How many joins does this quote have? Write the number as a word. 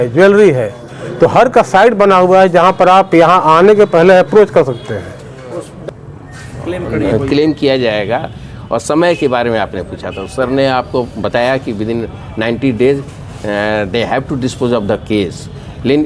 one